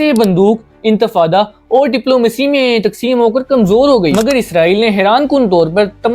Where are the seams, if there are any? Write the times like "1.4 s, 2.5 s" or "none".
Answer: 4.1 s